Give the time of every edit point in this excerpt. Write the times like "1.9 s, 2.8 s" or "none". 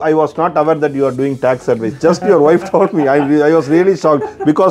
none